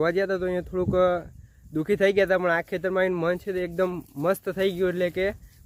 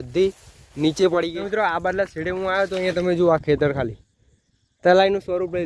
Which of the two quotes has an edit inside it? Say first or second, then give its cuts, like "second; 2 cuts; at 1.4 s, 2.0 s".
second; 1 cut; at 1.3 s